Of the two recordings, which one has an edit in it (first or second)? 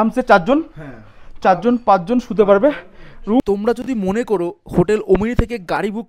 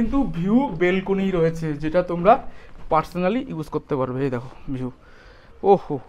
first